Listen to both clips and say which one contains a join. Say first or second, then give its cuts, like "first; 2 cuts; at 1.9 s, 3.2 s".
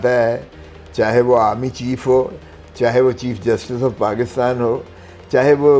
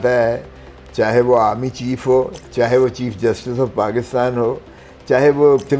second; 1 cut; at 2.4 s